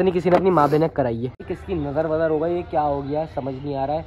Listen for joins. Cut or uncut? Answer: cut